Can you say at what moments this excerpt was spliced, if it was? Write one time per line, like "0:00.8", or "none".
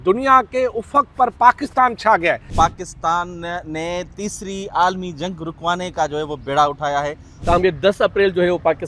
0:02.5
0:07.3